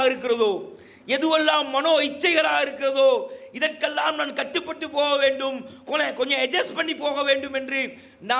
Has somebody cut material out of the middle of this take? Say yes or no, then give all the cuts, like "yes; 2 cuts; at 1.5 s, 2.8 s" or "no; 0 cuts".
no; 0 cuts